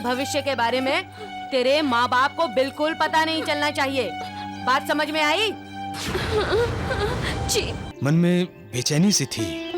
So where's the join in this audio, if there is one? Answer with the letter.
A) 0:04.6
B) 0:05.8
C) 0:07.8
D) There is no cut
C